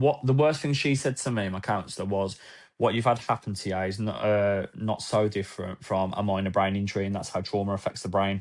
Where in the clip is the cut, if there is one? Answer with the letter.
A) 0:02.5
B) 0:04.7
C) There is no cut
C